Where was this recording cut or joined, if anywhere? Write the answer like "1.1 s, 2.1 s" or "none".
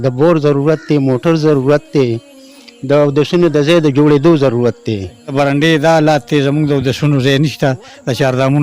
5.3 s